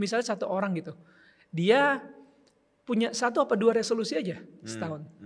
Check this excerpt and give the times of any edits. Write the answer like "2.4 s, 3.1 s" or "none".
none